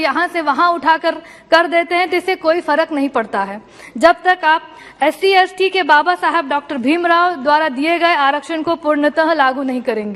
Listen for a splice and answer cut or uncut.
uncut